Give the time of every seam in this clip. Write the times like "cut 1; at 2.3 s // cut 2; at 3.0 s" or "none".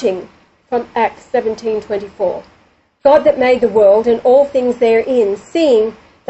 cut 1; at 5.0 s